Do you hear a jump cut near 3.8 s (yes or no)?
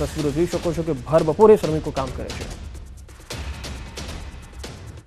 yes